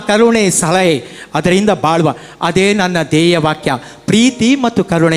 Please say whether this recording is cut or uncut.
uncut